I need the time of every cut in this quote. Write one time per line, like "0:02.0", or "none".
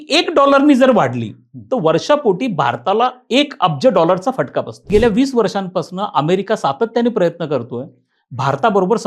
0:04.9